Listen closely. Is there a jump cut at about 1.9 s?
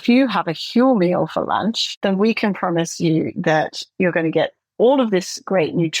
yes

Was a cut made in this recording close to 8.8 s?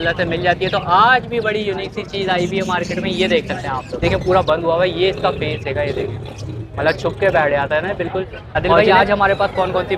yes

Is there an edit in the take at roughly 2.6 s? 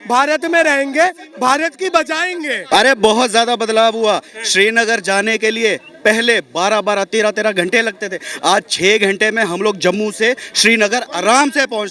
yes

